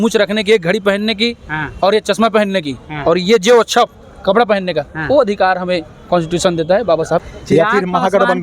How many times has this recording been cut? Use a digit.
1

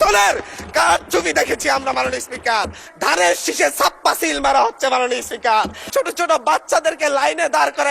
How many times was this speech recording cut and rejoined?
2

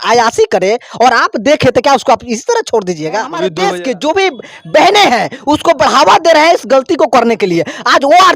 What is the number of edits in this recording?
1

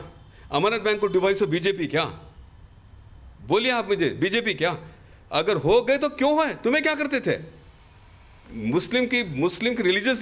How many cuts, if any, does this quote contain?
0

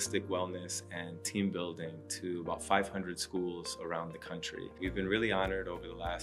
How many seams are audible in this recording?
1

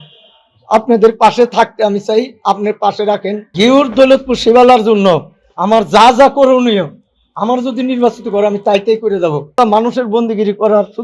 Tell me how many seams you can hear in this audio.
2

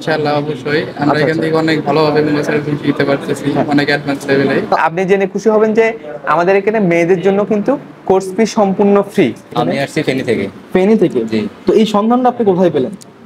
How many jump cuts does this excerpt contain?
2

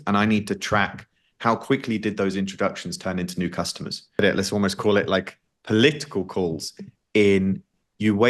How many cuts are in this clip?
1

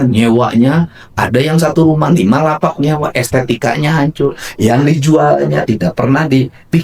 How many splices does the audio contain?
0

